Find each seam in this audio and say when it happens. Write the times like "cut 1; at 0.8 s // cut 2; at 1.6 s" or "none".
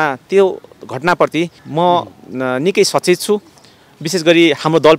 cut 1; at 1.6 s

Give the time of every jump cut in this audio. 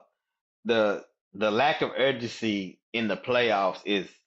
none

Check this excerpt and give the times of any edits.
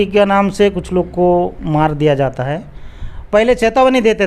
none

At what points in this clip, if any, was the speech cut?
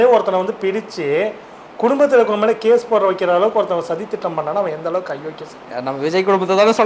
none

